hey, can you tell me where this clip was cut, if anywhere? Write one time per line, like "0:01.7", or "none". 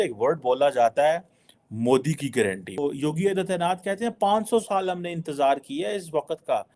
0:02.8